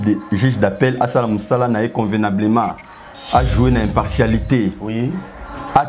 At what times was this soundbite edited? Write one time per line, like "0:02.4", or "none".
none